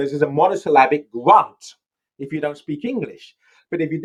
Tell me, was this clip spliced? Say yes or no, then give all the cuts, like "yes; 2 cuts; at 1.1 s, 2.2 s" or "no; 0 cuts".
no; 0 cuts